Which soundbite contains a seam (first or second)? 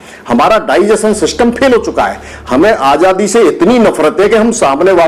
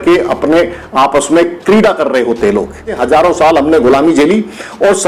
second